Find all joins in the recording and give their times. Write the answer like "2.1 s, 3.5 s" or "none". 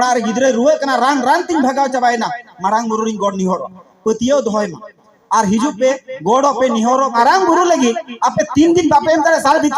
7.1 s